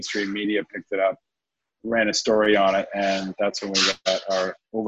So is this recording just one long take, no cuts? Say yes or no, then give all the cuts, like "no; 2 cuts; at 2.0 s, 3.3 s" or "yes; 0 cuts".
yes; 0 cuts